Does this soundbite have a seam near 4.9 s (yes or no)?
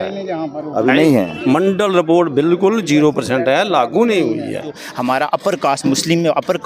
yes